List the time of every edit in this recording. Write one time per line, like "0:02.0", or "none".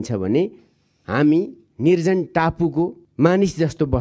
0:03.0